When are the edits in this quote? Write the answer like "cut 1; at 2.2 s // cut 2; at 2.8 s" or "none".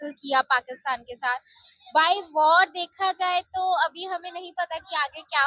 none